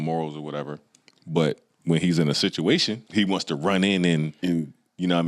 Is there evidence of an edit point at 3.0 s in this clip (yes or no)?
yes